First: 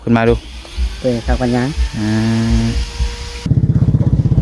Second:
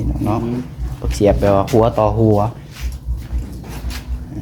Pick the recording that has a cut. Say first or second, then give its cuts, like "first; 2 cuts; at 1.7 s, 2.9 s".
first; 1 cut; at 3.5 s